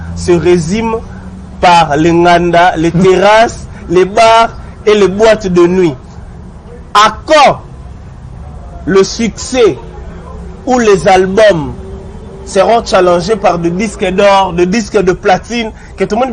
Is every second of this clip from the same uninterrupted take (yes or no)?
yes